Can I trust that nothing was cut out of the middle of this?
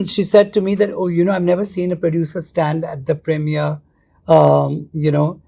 yes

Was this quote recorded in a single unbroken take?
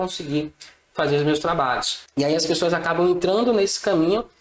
no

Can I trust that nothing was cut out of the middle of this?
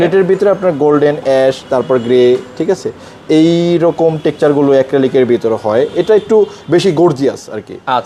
yes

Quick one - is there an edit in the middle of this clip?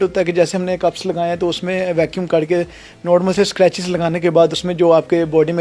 no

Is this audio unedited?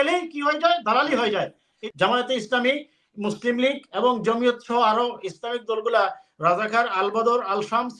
no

